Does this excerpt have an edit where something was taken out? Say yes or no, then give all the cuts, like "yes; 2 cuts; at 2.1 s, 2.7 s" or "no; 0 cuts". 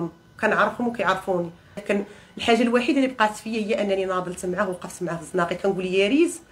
yes; 1 cut; at 1.8 s